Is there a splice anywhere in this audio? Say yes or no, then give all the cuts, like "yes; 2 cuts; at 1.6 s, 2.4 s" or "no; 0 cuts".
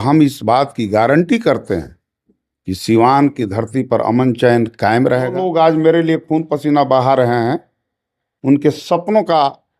yes; 1 cut; at 5.4 s